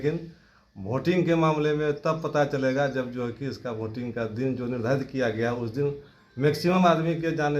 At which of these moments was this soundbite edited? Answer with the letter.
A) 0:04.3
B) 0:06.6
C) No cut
C